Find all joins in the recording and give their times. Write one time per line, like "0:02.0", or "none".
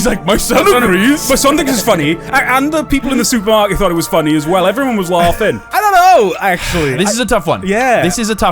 0:05.6